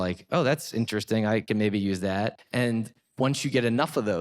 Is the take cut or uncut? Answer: cut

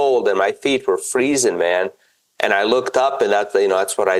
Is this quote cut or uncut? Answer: uncut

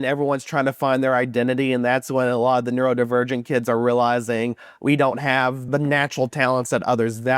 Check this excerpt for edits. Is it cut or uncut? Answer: cut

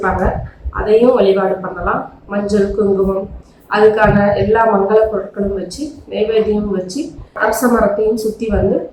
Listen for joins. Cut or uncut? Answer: uncut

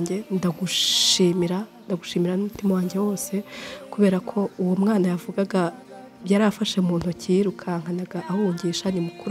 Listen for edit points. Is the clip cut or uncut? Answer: uncut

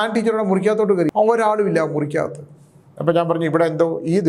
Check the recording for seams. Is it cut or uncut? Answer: cut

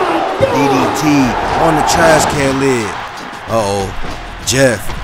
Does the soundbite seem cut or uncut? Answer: cut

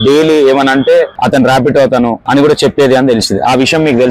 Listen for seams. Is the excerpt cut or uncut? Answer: cut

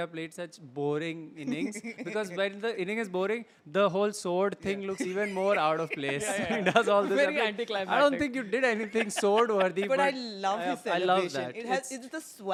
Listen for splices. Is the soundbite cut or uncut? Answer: uncut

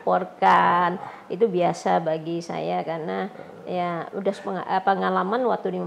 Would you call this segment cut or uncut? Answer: uncut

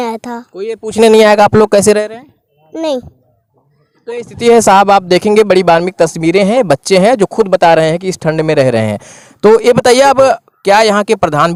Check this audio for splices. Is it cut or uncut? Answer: uncut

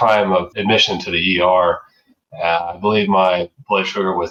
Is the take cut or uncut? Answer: uncut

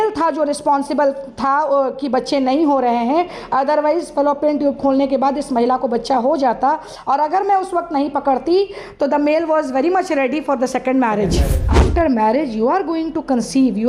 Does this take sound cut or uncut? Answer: cut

